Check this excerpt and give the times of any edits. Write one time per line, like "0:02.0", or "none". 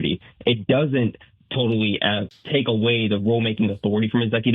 0:02.3